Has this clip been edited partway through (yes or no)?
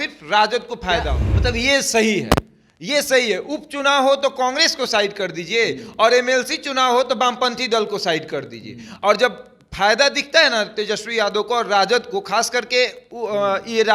yes